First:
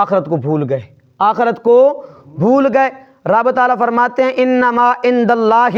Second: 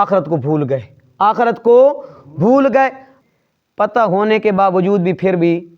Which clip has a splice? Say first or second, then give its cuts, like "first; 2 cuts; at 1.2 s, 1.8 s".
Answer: second; 1 cut; at 3.1 s